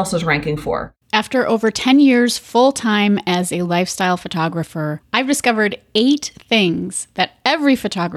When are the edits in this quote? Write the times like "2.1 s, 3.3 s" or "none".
0.9 s